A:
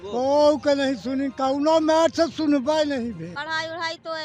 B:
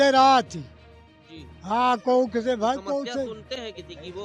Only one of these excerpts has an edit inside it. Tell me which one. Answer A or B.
A